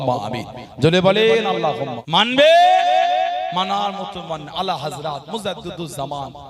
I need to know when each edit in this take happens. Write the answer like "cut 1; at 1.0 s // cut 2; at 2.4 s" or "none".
cut 1; at 1.9 s